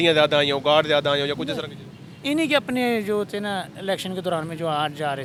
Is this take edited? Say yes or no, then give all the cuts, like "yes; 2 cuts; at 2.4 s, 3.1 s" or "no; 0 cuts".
no; 0 cuts